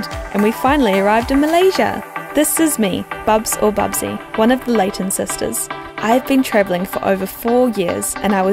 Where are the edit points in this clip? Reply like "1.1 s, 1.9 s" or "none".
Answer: 1.0 s